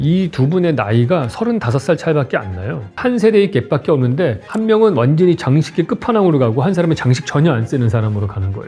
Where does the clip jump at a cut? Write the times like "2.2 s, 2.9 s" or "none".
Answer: 3.0 s